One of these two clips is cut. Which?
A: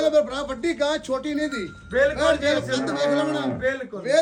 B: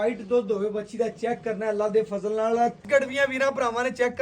B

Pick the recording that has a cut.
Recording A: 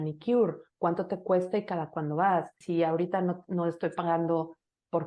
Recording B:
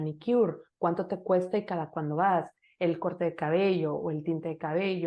A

